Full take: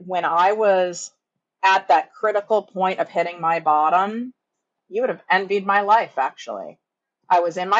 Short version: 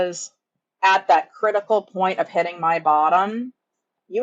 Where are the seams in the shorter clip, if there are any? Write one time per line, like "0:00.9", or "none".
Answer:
none